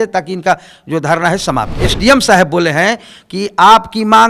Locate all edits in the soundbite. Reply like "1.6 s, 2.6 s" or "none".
1.7 s